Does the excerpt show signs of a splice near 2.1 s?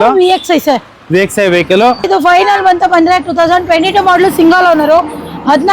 yes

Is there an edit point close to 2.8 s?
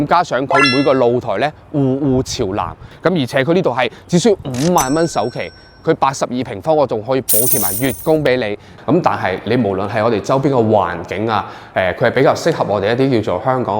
yes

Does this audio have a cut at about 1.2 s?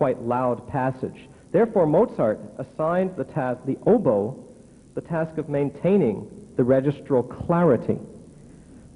no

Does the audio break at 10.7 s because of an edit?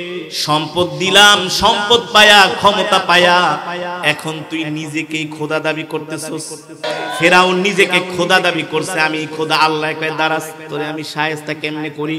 no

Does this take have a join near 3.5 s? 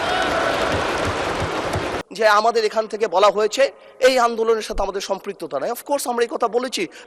no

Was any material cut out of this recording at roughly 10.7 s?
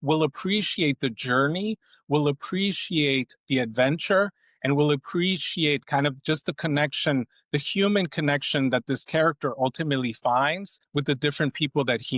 yes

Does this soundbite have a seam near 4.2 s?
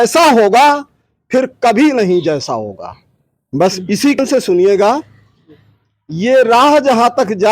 yes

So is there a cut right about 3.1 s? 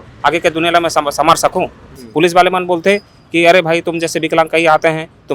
no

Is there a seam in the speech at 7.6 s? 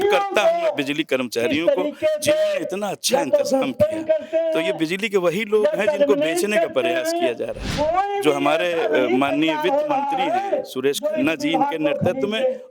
yes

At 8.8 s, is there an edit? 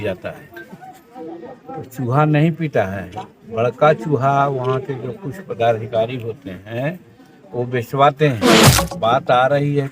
yes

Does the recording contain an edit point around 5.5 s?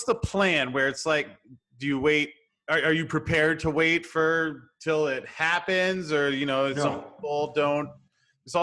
no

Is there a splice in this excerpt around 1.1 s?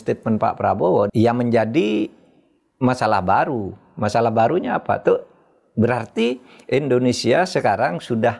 yes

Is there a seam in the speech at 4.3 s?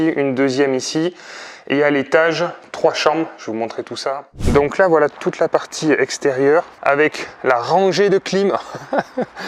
yes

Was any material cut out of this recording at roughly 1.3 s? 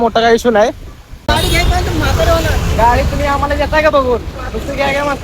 yes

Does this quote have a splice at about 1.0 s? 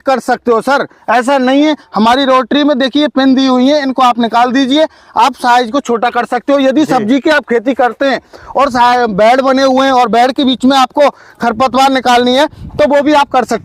no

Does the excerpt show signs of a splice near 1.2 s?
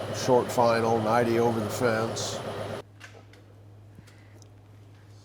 no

